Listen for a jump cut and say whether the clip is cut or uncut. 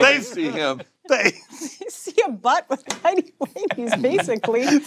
uncut